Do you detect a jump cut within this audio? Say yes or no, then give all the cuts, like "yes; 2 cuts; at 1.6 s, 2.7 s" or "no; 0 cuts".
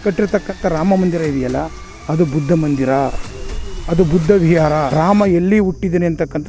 yes; 1 cut; at 4.9 s